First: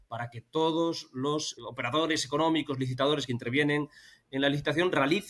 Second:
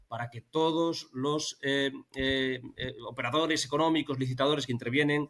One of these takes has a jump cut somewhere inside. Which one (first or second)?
first